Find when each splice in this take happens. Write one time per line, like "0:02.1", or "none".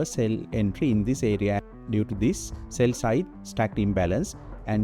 0:01.6